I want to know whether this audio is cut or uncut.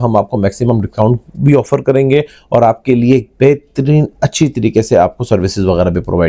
uncut